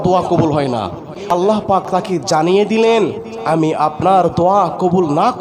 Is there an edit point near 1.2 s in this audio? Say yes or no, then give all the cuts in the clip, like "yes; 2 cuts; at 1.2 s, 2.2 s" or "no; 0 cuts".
yes; 1 cut; at 1.2 s